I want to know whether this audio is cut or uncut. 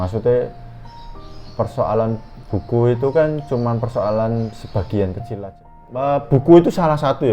cut